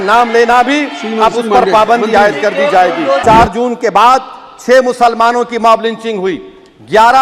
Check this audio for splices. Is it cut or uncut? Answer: cut